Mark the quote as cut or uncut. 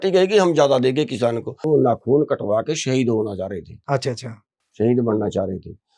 cut